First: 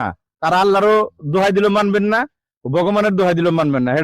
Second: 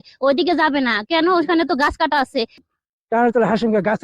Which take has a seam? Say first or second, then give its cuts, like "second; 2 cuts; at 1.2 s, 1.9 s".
second; 1 cut; at 2.6 s